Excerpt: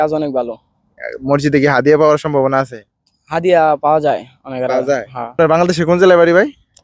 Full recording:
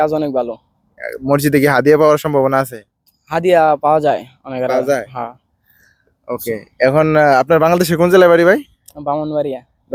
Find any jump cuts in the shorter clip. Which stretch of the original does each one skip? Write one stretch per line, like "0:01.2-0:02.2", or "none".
0:05.3-0:07.5